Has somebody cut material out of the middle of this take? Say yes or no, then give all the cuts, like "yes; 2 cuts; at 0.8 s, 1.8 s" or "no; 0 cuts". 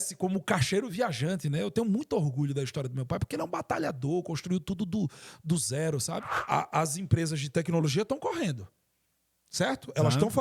yes; 1 cut; at 6.3 s